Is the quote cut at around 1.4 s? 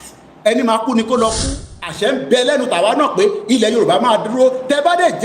yes; 1 cut; at 1.4 s

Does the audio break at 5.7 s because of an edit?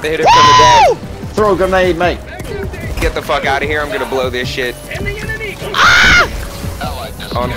no; 1 cut; at 3.0 s

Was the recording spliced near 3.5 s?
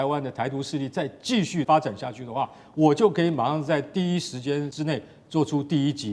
no; 2 cuts; at 1.7 s, 4.7 s

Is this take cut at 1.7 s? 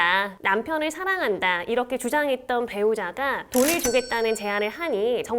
no; 1 cut; at 3.4 s

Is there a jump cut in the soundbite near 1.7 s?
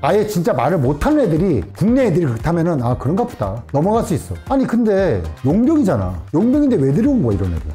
no; 0 cuts

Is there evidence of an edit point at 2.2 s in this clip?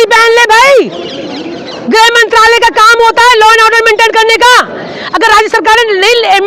no; 0 cuts

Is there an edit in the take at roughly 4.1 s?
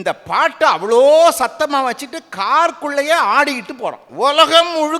yes; 1 cut; at 4.1 s

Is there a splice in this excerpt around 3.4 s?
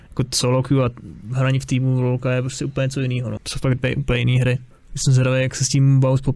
yes; 1 cut; at 3.4 s

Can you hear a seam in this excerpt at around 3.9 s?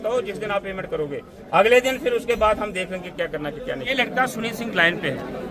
yes; 1 cut; at 3.9 s

